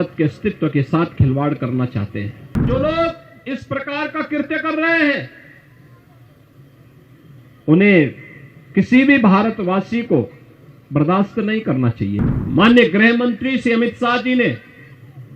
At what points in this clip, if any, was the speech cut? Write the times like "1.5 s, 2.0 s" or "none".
2.6 s, 12.2 s

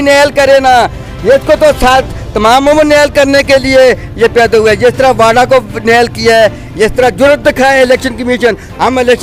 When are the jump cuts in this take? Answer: none

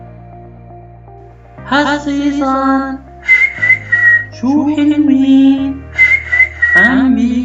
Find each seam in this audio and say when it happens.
1.7 s

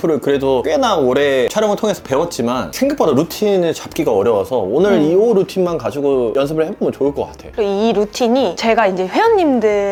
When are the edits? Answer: none

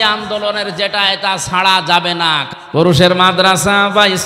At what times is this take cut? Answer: 2.4 s

